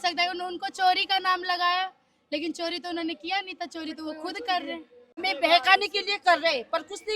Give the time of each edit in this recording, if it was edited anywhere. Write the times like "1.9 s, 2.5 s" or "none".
5.3 s